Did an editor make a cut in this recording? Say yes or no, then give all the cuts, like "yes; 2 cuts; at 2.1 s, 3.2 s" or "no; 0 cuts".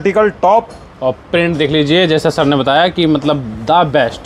no; 0 cuts